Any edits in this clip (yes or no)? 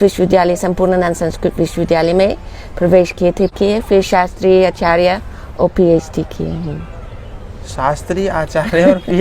yes